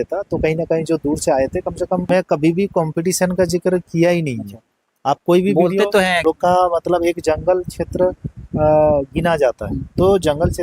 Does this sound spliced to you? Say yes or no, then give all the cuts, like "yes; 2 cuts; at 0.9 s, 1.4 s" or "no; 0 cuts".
yes; 2 cuts; at 2.1 s, 6.2 s